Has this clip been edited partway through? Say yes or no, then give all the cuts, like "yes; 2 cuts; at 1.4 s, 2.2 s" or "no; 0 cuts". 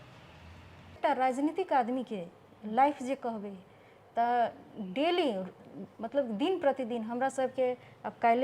yes; 1 cut; at 1.0 s